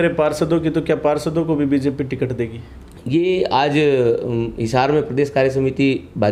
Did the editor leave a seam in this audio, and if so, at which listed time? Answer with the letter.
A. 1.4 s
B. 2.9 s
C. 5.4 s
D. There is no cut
D